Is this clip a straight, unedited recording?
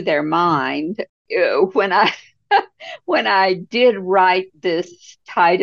no; 1 cut; at 1.0 s

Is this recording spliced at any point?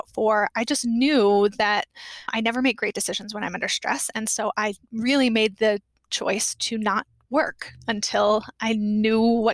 yes; 1 cut; at 2.3 s

